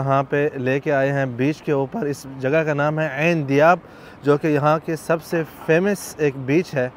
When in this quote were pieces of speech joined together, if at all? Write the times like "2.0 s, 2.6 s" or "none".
none